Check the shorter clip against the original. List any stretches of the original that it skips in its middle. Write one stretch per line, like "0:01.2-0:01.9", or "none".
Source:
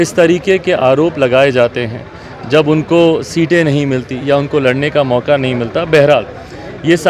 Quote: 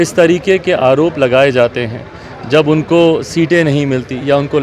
none

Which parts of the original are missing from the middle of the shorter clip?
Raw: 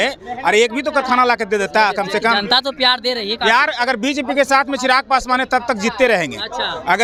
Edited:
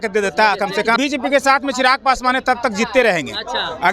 0:02.3-0:04.0

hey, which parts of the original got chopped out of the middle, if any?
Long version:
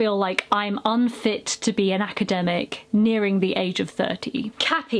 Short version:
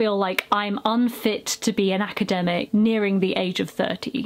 0:02.7-0:02.9

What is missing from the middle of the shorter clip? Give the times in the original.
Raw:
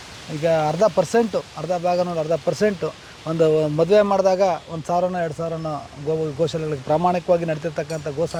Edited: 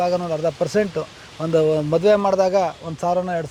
none

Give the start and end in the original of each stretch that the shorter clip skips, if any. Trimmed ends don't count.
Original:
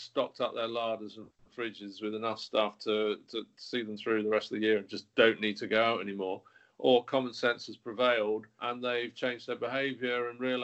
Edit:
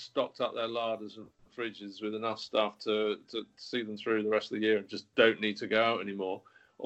none

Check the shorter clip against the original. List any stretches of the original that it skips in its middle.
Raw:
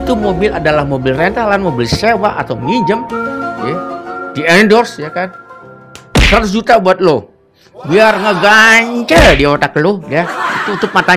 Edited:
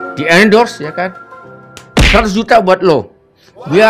none

